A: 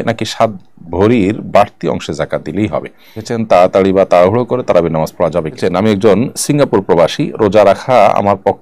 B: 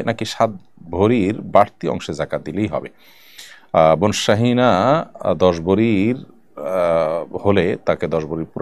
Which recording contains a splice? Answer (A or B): A